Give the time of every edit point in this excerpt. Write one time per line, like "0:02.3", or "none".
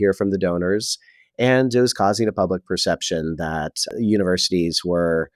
0:03.9

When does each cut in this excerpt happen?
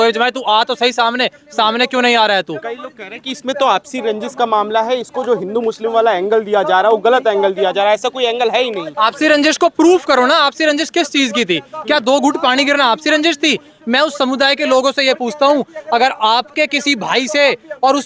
none

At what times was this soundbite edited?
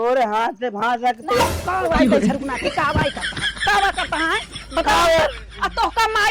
none

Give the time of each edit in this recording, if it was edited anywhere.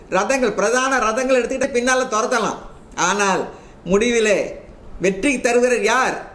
0:01.6

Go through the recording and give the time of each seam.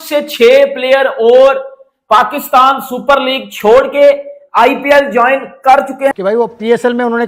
0:06.2

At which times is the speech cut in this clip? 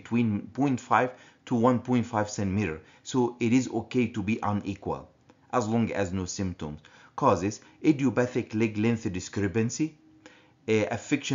0:08.1

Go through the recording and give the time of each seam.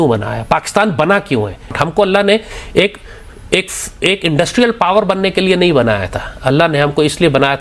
0:01.7

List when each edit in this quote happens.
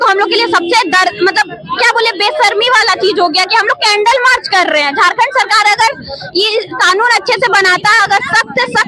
none

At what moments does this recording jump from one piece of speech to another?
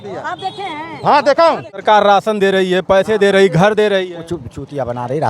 0:01.7

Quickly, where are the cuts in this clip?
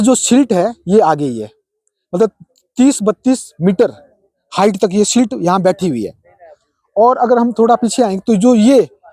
none

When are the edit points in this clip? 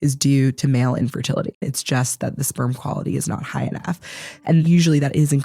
0:01.7
0:04.5

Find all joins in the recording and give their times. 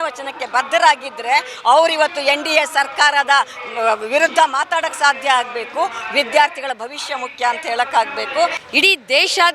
0:08.6

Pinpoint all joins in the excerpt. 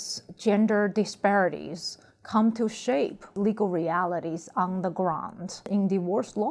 0:03.2
0:05.6

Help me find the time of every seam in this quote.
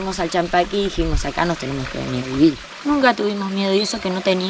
0:02.7

